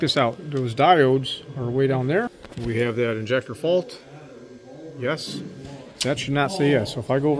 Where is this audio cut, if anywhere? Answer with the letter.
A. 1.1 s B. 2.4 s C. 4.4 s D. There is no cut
B